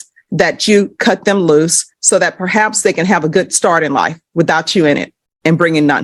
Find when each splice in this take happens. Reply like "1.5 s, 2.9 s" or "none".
none